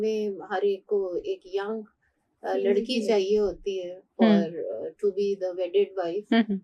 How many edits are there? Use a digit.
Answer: 0